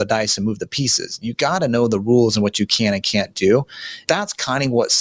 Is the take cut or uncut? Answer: cut